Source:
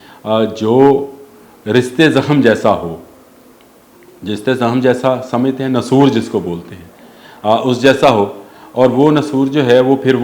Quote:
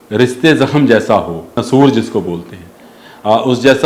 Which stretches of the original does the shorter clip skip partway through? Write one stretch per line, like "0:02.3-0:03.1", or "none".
0:03.1-0:05.8